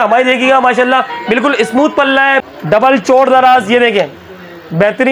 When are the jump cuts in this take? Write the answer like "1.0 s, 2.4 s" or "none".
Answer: 2.4 s